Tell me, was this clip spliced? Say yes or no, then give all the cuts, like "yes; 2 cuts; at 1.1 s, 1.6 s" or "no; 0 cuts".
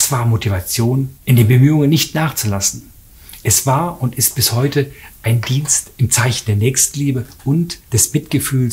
yes; 2 cuts; at 1.2 s, 7.8 s